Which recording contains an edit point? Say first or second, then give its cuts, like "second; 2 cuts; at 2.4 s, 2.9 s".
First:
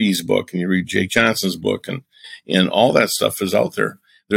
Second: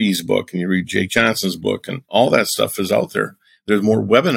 second; 1 cut; at 2.1 s